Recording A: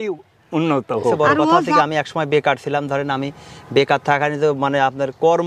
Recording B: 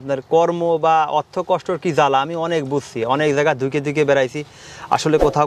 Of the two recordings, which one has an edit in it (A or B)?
A